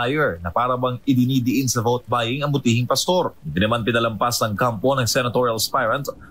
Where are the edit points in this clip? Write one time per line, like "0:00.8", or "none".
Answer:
none